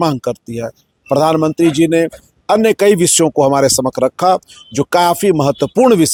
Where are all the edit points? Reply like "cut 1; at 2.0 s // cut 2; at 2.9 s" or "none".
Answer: none